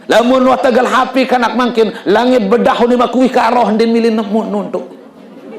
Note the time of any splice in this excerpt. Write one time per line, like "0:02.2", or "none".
none

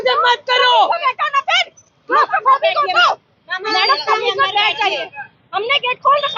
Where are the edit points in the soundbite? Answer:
none

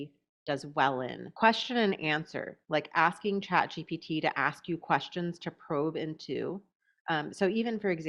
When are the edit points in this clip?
0:01.2

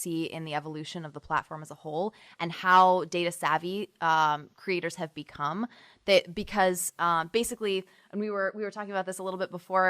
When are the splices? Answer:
none

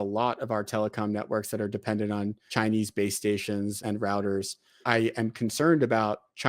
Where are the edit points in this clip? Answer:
0:02.5
0:03.8
0:04.8

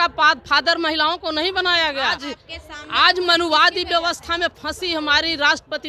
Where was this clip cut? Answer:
0:02.3

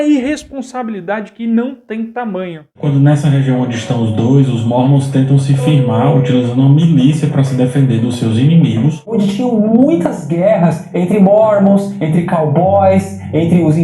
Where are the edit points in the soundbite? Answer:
0:02.8
0:09.1

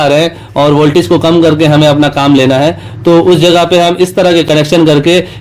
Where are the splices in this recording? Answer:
none

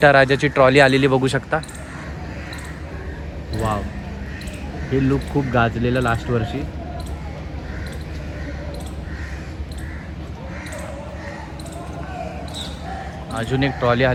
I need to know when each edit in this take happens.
none

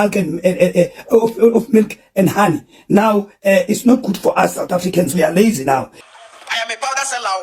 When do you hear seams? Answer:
0:05.9

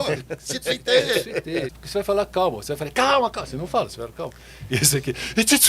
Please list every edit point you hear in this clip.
0:01.8

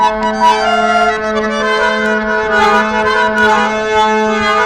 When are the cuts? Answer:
none

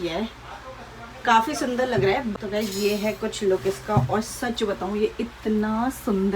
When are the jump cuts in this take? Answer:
0:02.3

